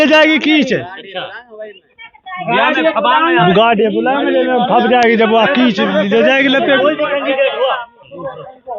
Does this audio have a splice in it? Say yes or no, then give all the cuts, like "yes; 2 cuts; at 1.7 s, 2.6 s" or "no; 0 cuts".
no; 0 cuts